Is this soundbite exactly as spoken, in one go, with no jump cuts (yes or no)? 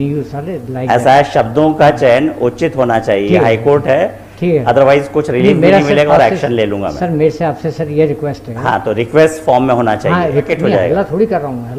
no